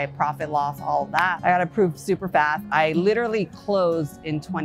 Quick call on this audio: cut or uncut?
cut